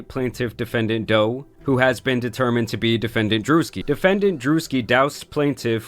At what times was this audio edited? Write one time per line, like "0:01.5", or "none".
0:03.8